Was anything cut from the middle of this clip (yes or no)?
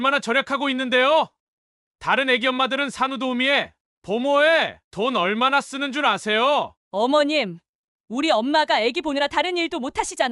yes